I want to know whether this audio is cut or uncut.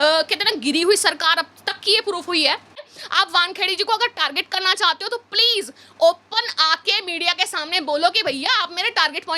cut